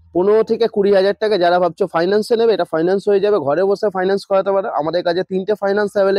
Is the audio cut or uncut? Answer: uncut